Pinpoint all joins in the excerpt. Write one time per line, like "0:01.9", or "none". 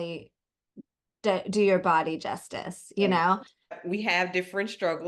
0:03.7